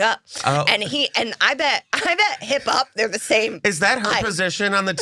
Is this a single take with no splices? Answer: yes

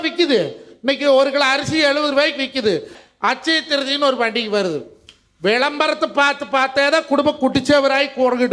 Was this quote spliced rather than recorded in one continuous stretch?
yes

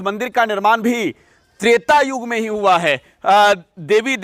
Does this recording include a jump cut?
no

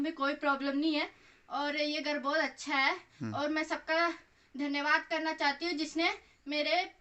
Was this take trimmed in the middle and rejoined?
no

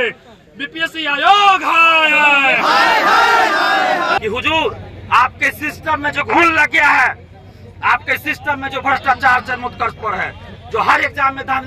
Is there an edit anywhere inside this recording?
yes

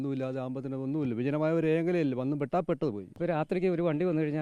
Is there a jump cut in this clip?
yes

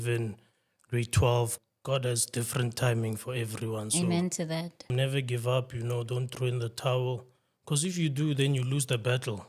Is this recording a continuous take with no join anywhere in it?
no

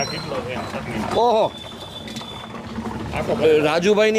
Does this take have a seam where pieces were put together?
no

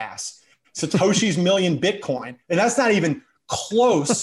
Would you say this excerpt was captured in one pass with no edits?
no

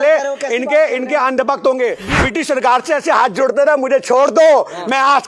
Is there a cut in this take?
yes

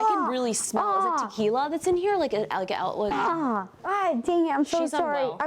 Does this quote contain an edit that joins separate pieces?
yes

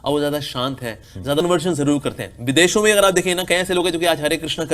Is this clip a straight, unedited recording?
no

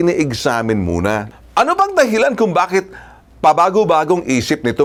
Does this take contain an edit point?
no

